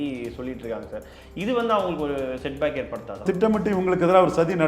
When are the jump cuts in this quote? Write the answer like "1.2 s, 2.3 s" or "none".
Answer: 3.2 s